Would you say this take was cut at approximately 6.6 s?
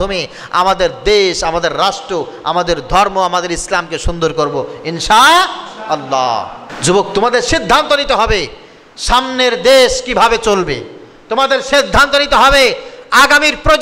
yes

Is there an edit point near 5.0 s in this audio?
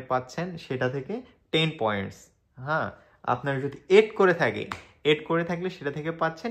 no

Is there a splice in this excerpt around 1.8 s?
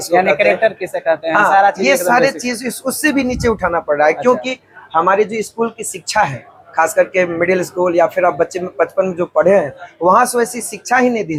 no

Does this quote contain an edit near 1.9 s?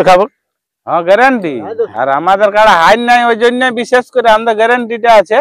yes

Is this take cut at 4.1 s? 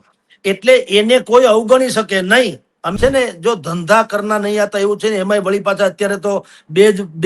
no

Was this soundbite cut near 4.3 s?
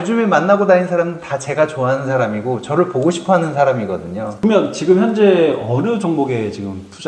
yes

